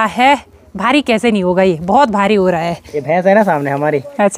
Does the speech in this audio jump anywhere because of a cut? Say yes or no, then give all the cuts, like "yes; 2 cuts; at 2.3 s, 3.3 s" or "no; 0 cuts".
yes; 1 cut; at 2.8 s